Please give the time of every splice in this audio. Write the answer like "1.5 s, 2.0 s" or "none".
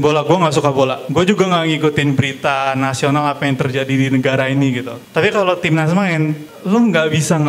1.0 s, 4.9 s, 6.5 s